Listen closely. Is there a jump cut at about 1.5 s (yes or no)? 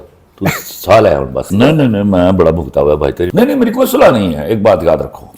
yes